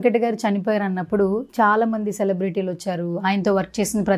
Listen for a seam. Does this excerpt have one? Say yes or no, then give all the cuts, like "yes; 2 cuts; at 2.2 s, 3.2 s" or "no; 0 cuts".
no; 0 cuts